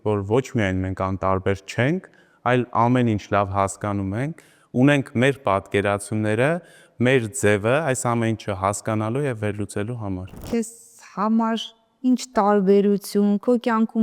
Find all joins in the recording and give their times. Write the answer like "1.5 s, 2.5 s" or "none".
10.3 s